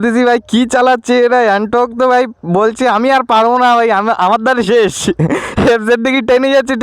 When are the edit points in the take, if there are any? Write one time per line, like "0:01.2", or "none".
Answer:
none

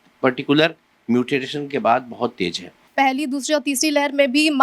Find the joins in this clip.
0:02.8

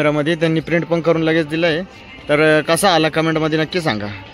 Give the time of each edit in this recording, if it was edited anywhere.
none

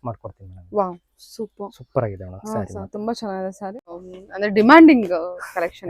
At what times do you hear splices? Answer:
0:04.1

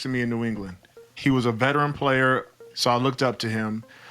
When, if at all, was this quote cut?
0:01.1
0:02.7

